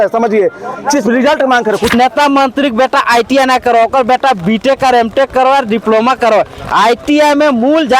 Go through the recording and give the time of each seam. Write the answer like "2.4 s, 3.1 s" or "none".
1.9 s